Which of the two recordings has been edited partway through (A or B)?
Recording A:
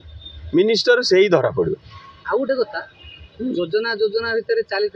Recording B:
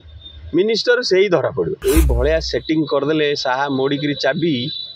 B